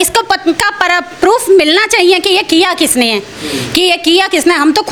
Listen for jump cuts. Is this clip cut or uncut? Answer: uncut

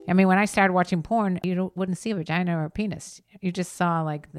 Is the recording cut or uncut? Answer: cut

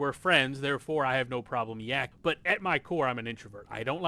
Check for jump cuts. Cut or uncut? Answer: cut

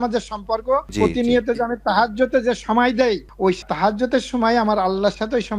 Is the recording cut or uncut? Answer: cut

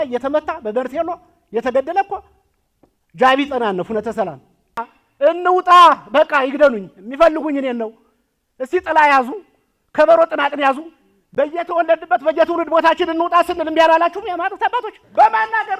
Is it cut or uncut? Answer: uncut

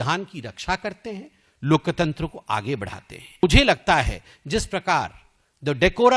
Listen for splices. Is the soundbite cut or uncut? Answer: cut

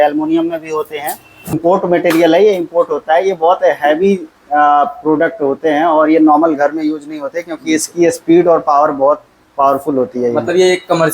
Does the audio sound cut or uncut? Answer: cut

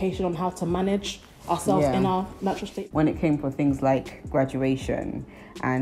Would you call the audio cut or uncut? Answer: cut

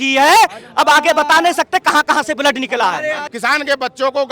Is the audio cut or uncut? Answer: cut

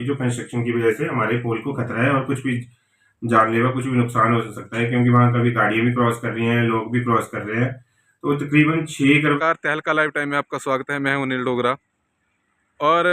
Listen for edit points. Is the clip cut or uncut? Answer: cut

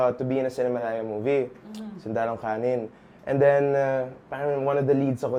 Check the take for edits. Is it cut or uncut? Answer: uncut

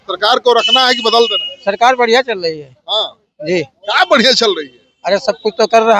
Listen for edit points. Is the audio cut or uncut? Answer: uncut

